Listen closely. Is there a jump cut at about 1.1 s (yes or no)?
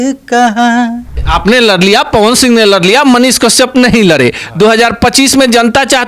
yes